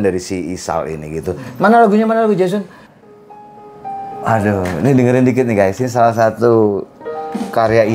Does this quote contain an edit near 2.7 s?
yes; 1 cut; at 2.7 s

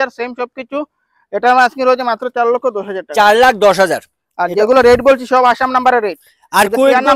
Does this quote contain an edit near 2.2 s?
no; 0 cuts

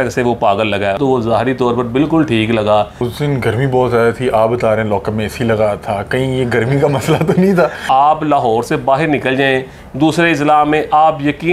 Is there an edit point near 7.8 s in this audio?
yes; 3 cuts; at 1.0 s, 3.0 s, 7.8 s

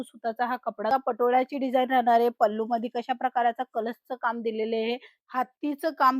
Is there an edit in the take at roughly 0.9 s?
yes; 2 cuts; at 0.9 s, 5.1 s

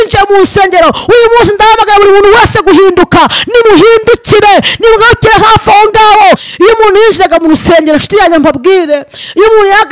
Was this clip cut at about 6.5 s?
yes; 1 cut; at 6.5 s

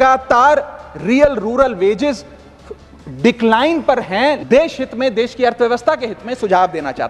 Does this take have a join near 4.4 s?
yes; 1 cut; at 4.4 s

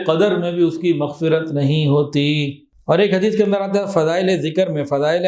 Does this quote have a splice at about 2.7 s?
yes; 1 cut; at 2.7 s

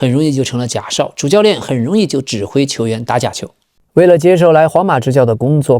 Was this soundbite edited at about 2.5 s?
no; 1 cut; at 3.8 s

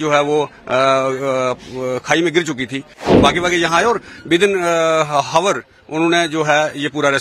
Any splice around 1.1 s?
no; 1 cut; at 3.1 s

